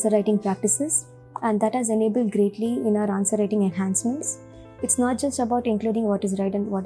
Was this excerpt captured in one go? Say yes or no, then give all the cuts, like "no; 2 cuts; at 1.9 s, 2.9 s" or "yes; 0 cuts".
yes; 0 cuts